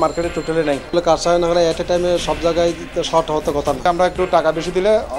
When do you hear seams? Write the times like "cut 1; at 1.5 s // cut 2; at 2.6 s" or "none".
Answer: cut 1; at 0.9 s // cut 2; at 3.8 s